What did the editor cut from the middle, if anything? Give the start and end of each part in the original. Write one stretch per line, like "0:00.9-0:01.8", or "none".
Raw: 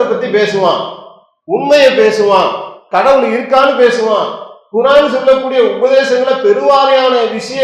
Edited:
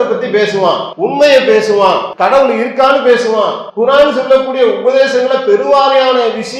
0:00.9-0:01.4
0:02.6-0:02.8
0:04.3-0:04.6